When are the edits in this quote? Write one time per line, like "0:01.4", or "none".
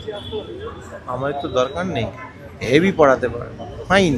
none